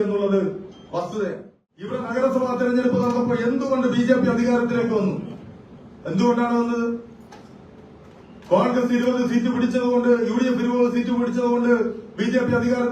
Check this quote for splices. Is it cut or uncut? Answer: cut